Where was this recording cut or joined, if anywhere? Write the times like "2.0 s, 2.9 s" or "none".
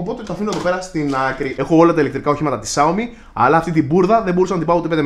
1.5 s